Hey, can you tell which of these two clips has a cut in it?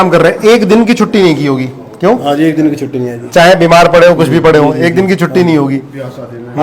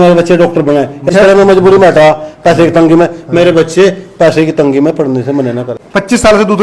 second; 2 cuts; at 1.1 s, 5.7 s

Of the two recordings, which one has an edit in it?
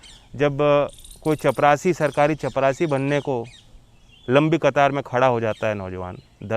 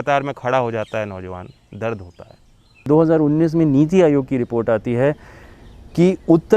second; 1 cut; at 2.9 s

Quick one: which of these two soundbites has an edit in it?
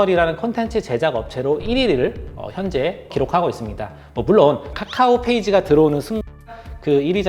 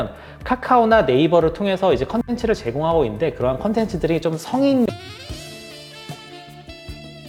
first; 1 cut; at 3.1 s

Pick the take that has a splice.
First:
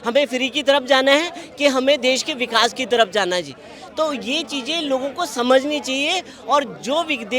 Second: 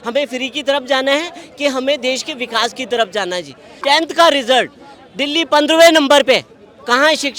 second; 1 cut; at 3.6 s

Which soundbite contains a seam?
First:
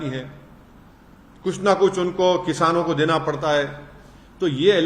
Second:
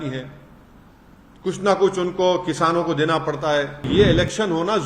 second; 1 cut; at 3.9 s

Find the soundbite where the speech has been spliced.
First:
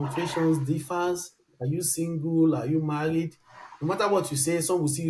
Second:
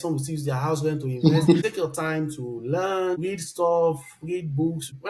second; 2 cuts; at 1.6 s, 3.2 s

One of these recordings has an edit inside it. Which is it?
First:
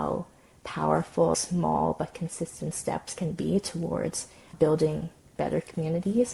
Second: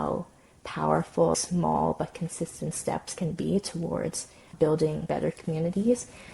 second; 1 cut; at 5.0 s

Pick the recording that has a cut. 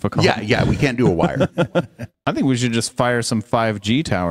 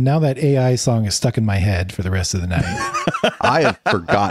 first; 1 cut; at 2.1 s

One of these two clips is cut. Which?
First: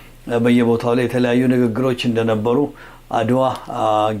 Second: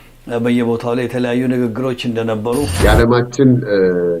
second; 1 cut; at 2.7 s

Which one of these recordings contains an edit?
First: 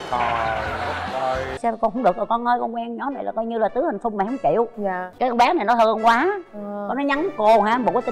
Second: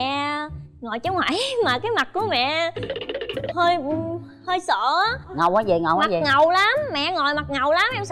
first; 2 cuts; at 1.6 s, 5.1 s

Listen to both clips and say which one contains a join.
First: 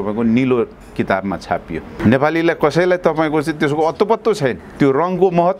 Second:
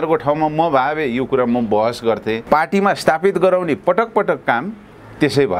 second; 1 cut; at 2.4 s

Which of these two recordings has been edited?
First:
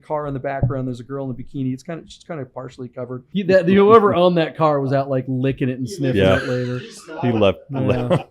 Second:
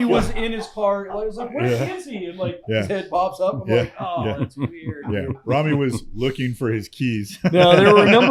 first; 1 cut; at 3.2 s

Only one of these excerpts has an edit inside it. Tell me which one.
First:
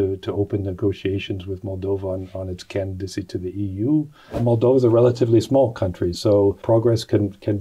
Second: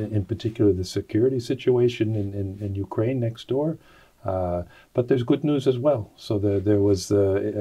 first; 2 cuts; at 4.4 s, 6.6 s

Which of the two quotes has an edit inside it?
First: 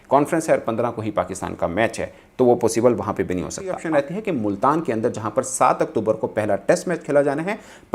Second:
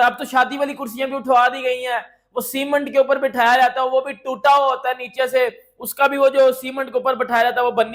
first; 1 cut; at 3.8 s

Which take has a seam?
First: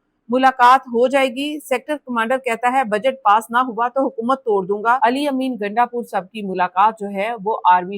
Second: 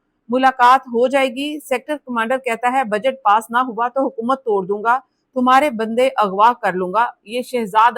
first; 1 cut; at 5.0 s

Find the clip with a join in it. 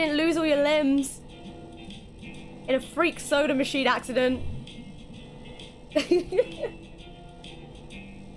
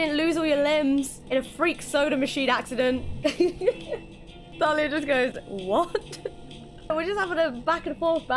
second; 4 cuts; at 1.2 s, 3.1 s, 4.5 s, 6.9 s

